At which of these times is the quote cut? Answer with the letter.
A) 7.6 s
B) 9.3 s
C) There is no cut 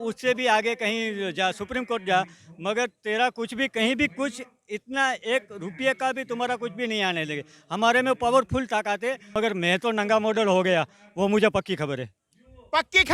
B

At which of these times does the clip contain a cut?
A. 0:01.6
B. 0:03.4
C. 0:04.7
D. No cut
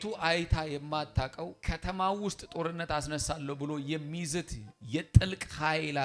A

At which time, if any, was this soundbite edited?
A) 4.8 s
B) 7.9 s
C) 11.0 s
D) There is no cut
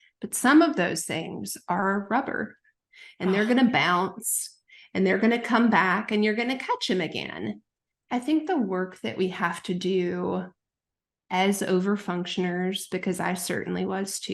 B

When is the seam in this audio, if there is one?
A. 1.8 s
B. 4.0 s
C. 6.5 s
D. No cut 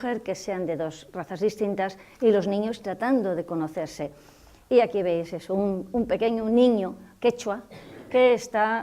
A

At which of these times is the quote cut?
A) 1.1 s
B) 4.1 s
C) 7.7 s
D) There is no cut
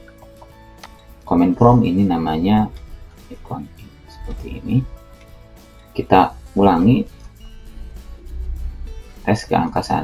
D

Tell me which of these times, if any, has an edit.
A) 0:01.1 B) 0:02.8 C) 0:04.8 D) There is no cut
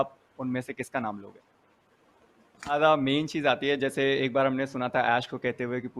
B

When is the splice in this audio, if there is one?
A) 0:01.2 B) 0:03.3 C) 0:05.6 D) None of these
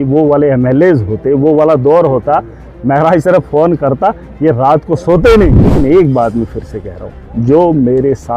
C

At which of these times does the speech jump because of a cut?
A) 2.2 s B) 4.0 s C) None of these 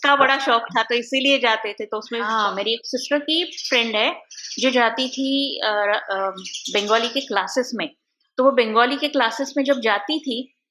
A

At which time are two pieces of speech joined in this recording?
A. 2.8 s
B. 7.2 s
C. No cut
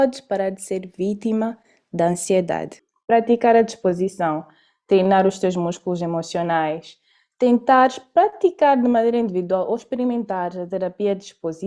A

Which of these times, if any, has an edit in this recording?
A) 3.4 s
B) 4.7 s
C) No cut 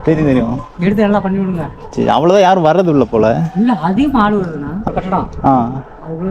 B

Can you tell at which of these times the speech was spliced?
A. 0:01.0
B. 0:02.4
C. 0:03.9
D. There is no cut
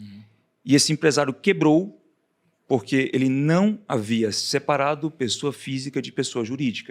D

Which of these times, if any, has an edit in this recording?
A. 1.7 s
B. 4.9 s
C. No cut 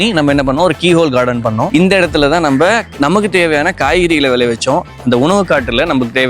A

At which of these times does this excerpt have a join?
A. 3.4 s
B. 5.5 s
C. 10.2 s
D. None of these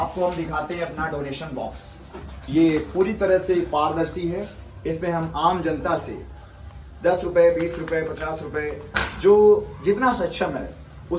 D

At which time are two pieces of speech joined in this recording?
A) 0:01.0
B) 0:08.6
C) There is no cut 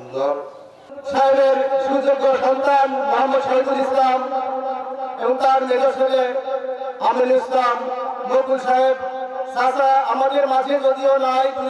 A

